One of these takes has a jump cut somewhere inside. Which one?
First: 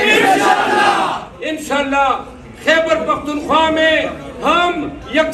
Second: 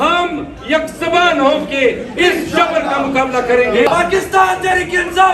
second; 1 cut; at 3.9 s

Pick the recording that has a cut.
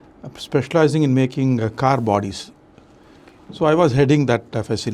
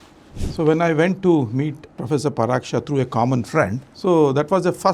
second; 2 cuts; at 1.9 s, 3.9 s

